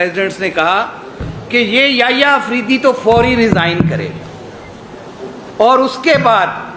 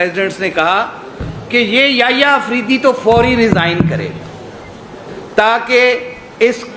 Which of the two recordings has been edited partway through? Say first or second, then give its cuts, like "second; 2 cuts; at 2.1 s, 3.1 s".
second; 1 cut; at 5.2 s